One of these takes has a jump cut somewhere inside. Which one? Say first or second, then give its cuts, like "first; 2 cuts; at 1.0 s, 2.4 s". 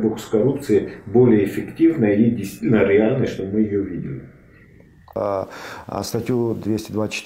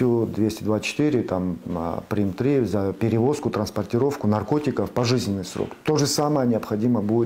first; 1 cut; at 5.2 s